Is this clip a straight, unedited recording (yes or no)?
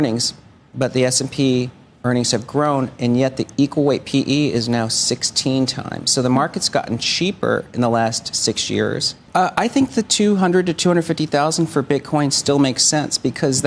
no